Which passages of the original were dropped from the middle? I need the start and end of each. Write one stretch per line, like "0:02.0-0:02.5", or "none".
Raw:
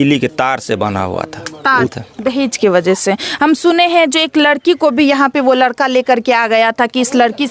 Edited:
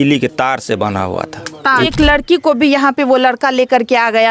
0:01.9-0:04.3